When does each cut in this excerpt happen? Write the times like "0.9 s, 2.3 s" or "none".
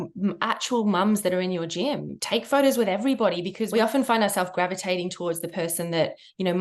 2.1 s, 3.6 s